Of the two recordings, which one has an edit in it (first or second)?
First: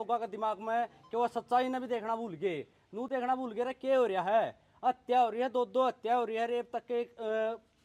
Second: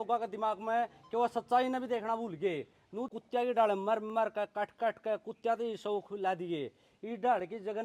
second